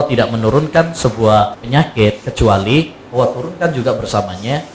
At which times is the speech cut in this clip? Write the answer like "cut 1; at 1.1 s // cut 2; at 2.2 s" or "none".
cut 1; at 1.6 s